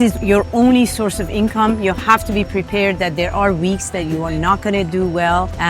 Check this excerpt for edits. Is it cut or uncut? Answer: uncut